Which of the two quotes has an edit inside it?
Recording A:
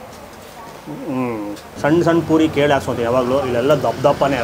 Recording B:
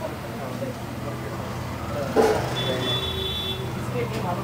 A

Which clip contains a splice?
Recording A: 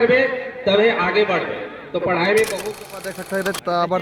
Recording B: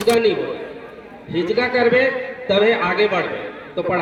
A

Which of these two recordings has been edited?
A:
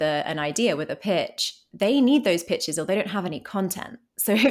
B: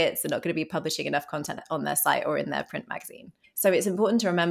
B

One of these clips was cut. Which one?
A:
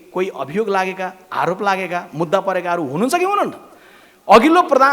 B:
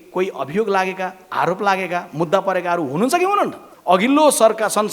B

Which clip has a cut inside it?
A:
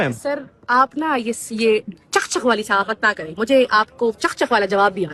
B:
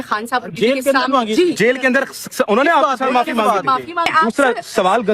B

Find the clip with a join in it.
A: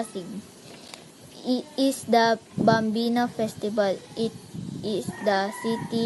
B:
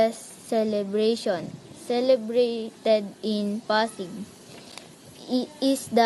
A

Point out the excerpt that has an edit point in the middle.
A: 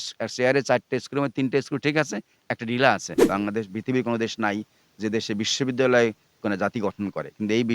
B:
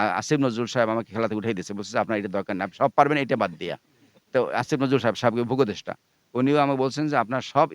A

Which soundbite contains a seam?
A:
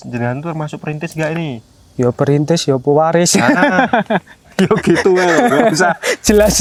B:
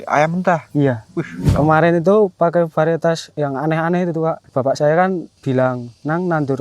B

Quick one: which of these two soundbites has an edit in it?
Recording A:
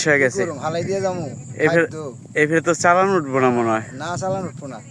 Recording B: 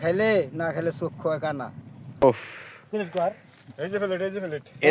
B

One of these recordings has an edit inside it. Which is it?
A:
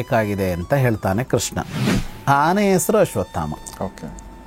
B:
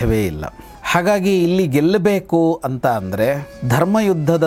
A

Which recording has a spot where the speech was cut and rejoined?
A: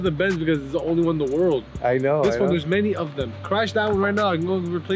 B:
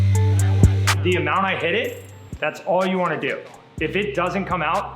B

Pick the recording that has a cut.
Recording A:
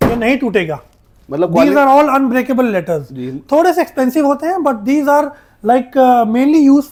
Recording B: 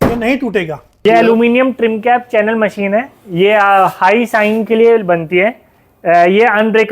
B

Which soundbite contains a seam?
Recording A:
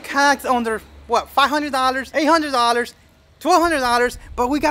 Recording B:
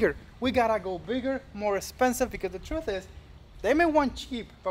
A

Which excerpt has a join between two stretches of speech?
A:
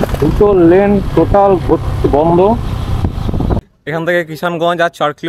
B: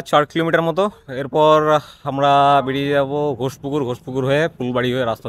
A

